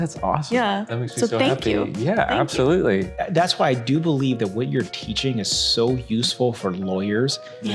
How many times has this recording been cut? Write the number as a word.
one